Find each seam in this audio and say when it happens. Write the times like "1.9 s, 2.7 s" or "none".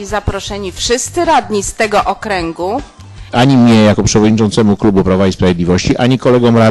3.3 s